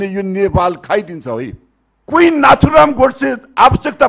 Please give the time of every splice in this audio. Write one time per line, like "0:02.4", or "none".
0:02.0

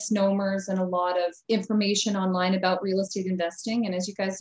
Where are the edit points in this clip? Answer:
0:01.4

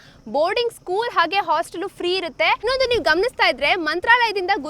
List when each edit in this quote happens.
0:02.6

